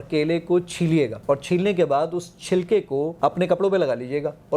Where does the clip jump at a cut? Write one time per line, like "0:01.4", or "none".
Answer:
0:01.2
0:03.1